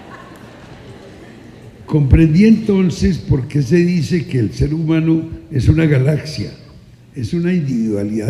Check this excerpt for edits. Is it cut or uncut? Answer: uncut